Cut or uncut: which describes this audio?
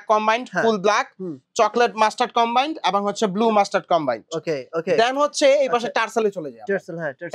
uncut